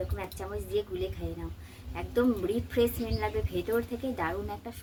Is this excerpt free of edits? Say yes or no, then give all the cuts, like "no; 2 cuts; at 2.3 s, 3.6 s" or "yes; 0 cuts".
yes; 0 cuts